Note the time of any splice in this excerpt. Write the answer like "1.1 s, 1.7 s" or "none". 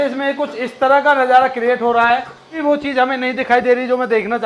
2.6 s